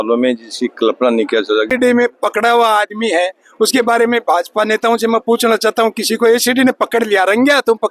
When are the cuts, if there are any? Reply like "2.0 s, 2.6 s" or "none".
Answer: 1.7 s